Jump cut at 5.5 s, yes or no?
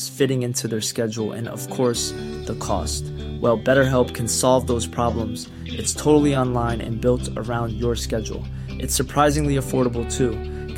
no